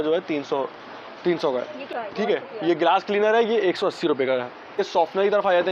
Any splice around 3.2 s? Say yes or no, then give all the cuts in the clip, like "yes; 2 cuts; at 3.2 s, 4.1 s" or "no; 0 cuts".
no; 2 cuts; at 1.8 s, 4.8 s